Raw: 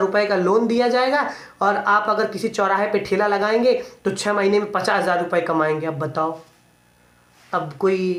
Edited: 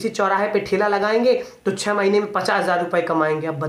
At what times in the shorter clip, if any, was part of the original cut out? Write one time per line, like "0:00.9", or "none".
none